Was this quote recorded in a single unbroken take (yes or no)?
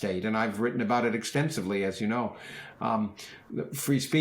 yes